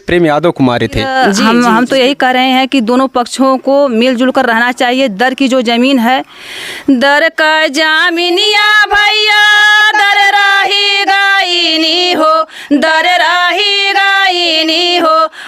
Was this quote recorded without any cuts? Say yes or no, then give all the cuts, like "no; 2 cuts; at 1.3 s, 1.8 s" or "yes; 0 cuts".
no; 1 cut; at 1.2 s